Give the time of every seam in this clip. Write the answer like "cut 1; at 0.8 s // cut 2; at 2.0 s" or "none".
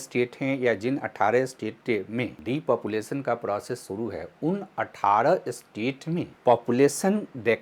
cut 1; at 2.4 s // cut 2; at 6.3 s